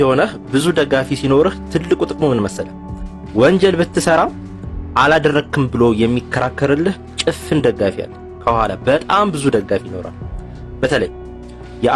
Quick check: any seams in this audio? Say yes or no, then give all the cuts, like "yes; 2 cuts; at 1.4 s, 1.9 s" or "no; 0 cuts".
no; 0 cuts